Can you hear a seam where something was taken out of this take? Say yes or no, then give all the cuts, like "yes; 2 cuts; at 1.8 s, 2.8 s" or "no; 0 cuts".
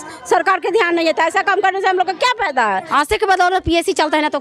yes; 1 cut; at 2.9 s